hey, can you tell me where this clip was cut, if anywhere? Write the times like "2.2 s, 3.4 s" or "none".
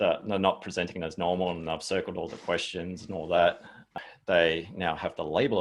3.9 s